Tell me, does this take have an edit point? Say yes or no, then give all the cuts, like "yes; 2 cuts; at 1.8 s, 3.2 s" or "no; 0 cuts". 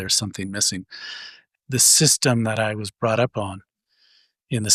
yes; 1 cut; at 1.4 s